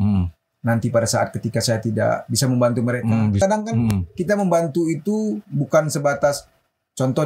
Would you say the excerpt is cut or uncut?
cut